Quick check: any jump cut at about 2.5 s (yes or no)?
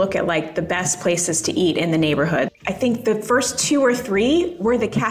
yes